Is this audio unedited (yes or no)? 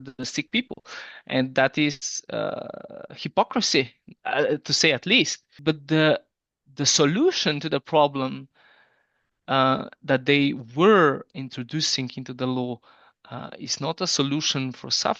no